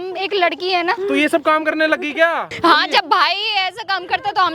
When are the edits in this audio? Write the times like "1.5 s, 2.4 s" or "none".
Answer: 1.0 s, 2.5 s